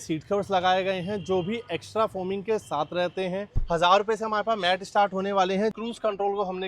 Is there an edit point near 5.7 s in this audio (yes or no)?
yes